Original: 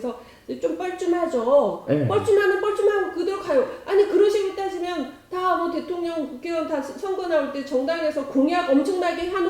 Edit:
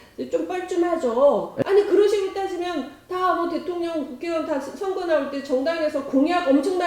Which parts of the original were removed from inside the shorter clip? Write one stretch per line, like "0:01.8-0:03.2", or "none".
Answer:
0:01.8-0:03.8